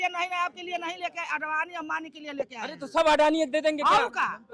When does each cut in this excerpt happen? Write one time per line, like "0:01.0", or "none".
none

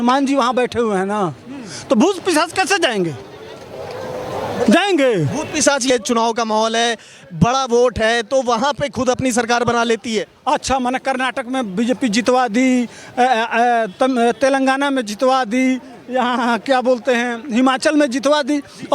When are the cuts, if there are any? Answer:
0:05.9

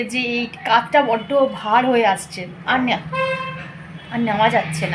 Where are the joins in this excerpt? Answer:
none

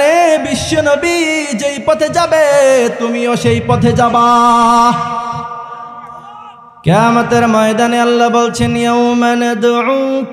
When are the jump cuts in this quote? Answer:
0:06.6

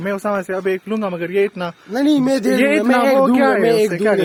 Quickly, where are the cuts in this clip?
none

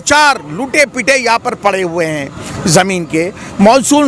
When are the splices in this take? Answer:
none

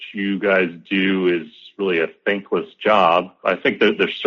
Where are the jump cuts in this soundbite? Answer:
0:03.3

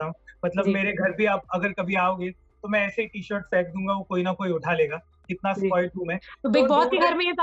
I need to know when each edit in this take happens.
none

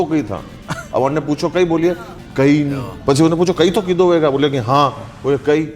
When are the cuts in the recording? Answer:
0:02.9

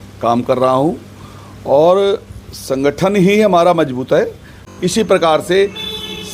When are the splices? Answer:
0:04.6

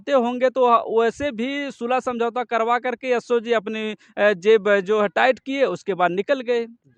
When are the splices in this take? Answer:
none

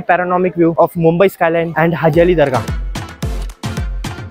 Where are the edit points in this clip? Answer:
0:00.7
0:01.7
0:02.6

